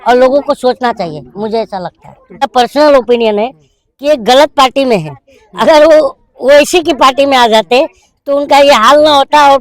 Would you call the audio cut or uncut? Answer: cut